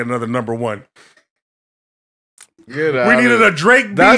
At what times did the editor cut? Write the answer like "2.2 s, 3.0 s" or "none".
none

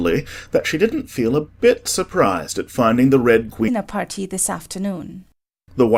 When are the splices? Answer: none

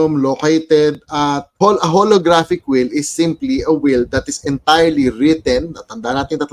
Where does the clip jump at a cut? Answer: 1.6 s

